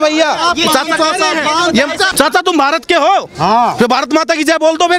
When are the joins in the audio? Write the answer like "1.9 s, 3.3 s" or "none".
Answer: 2.1 s